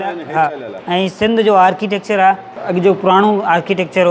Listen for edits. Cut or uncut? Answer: cut